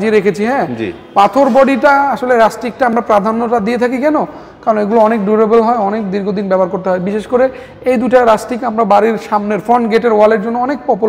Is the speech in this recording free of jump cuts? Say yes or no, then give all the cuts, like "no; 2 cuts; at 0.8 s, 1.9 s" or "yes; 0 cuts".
yes; 0 cuts